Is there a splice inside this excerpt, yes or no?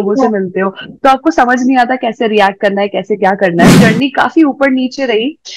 yes